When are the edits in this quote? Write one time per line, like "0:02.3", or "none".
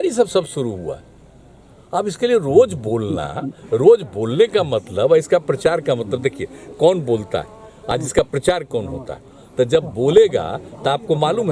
none

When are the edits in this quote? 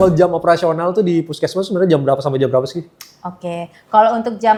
none

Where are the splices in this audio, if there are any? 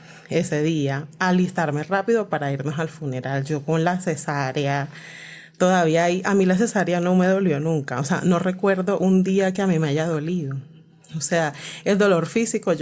none

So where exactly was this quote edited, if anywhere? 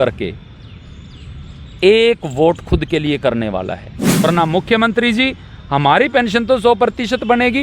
0:04.2

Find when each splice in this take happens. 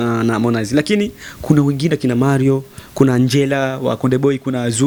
none

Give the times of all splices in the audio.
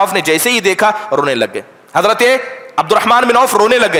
none

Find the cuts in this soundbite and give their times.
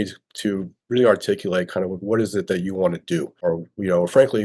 0:03.3

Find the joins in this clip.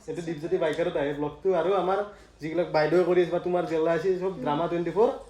none

